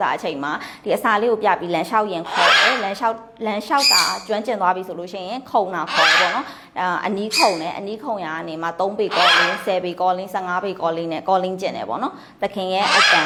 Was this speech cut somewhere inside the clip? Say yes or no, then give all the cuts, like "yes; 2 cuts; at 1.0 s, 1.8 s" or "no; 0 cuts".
no; 0 cuts